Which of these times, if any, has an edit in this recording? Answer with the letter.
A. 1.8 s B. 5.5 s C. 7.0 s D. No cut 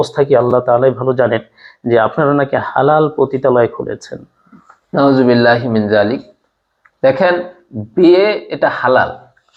D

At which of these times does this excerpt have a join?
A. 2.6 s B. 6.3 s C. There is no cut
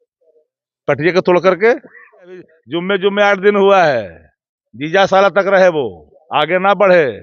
A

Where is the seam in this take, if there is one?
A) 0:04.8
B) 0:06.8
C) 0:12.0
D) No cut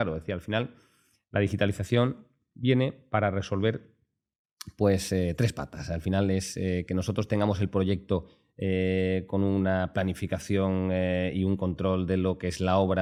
D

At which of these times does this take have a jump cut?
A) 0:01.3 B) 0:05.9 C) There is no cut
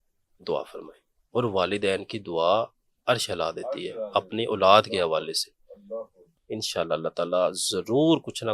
B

